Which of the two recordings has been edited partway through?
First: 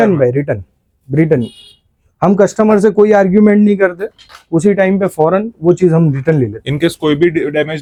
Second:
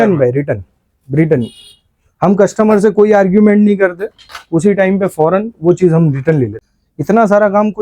second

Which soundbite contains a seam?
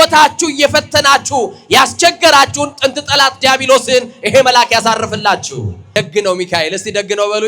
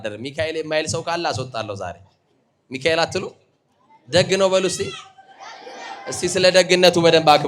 first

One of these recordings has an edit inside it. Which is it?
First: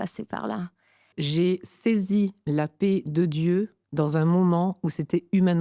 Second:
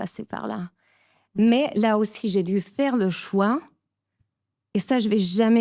first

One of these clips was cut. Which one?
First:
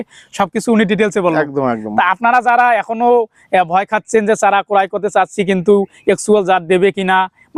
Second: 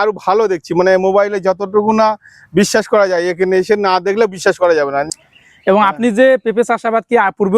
second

